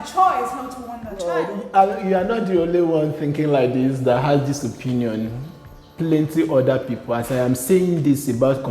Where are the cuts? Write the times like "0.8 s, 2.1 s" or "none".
1.3 s